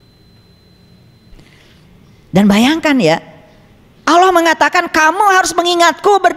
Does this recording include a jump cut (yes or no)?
yes